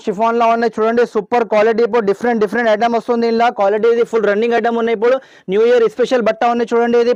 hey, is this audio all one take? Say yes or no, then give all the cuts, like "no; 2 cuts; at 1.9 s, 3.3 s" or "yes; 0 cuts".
yes; 0 cuts